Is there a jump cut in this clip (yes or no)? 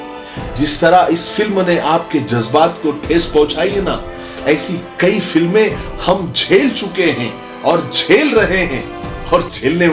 no